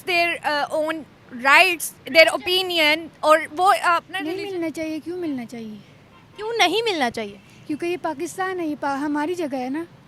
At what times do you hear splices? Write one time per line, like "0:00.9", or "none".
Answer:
0:04.1